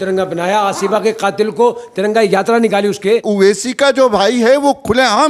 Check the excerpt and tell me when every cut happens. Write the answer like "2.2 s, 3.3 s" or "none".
3.2 s